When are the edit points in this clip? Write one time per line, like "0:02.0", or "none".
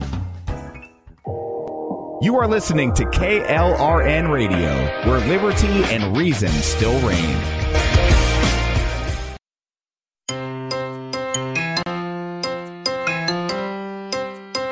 none